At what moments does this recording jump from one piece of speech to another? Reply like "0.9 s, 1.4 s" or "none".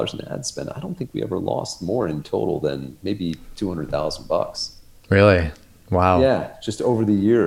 none